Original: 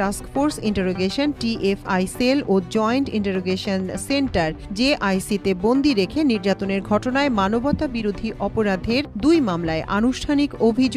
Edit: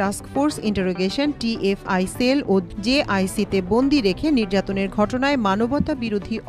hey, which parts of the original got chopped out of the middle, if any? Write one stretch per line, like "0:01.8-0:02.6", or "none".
0:02.7-0:04.6